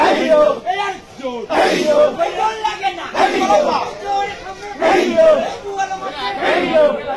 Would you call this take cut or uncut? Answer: uncut